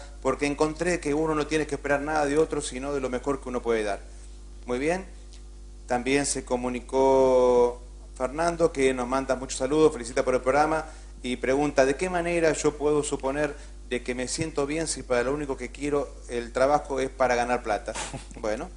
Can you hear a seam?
yes; 1 cut; at 2.5 s

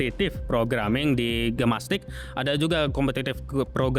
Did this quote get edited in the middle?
no; 0 cuts

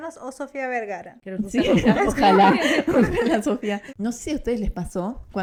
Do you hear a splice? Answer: no; 0 cuts

